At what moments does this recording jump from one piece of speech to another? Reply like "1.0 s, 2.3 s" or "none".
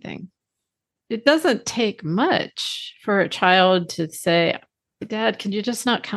1.0 s, 5.1 s

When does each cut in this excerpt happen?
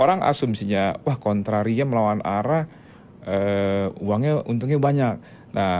none

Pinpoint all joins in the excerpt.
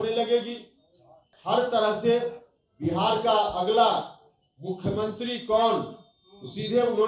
1.5 s

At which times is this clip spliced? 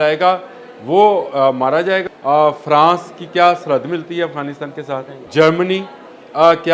2.0 s, 5.2 s

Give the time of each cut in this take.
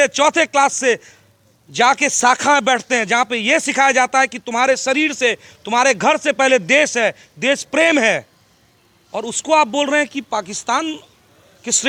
none

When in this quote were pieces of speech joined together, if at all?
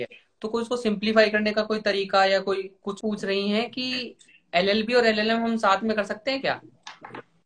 3.0 s

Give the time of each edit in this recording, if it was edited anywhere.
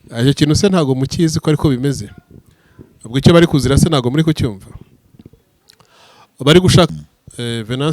6.9 s

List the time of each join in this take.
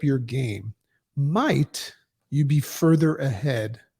none

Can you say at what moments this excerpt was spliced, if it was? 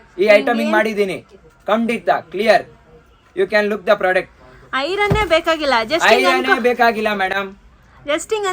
none

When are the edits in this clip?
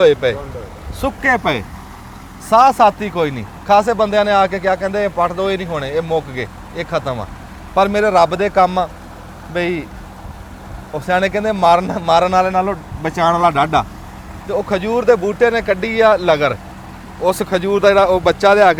none

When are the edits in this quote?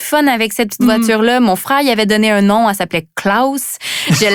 none

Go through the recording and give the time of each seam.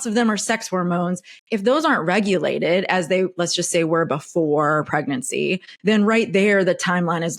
5.7 s

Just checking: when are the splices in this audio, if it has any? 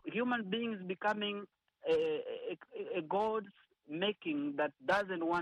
none

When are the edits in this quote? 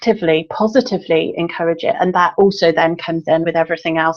2.3 s, 3.4 s

